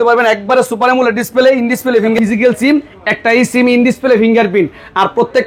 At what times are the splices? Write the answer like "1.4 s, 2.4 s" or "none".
2.2 s